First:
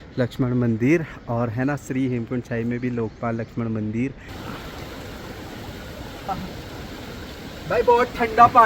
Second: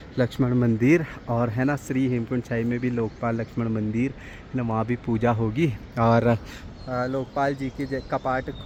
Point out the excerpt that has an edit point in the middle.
first; 2 cuts; at 4.3 s, 6.3 s

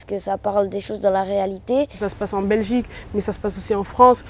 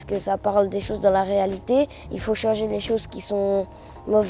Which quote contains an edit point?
first; 1 cut; at 1.9 s

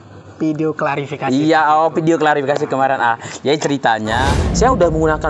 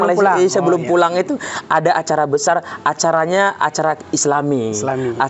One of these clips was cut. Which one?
first; 1 cut; at 4.2 s

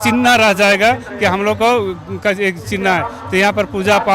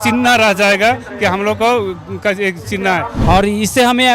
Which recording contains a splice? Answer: second; 1 cut; at 3.1 s

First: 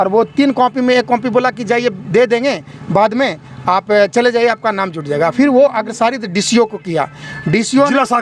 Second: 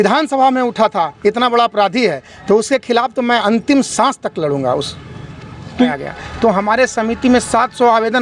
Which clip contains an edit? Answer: second; 1 cut; at 5.9 s

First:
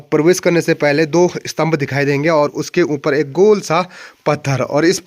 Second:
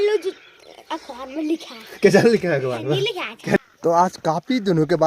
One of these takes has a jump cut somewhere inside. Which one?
second; 1 cut; at 3.6 s

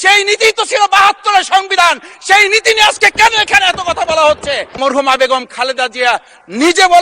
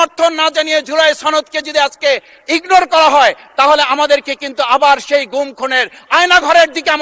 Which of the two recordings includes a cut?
first; 1 cut; at 4.7 s

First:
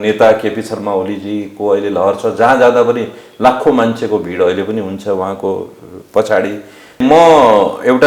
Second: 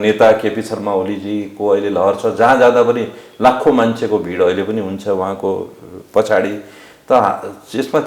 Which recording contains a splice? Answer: first; 1 cut; at 7.0 s

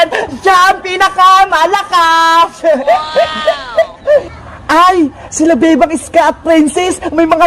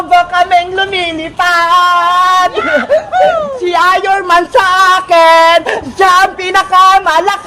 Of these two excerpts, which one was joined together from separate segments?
second; 1 cut; at 3.5 s

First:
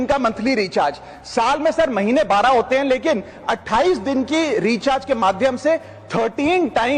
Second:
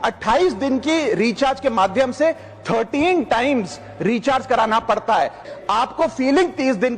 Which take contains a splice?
second; 1 cut; at 5.4 s

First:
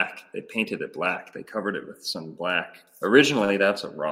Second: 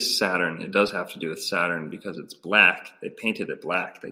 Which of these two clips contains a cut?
first; 1 cut; at 2.8 s

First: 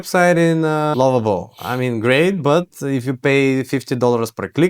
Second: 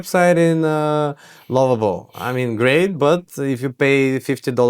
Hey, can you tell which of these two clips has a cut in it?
first; 1 cut; at 0.9 s

